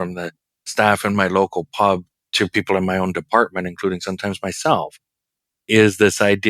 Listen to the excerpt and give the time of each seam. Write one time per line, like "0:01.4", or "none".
0:02.1